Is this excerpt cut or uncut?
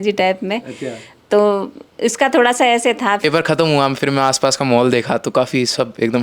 cut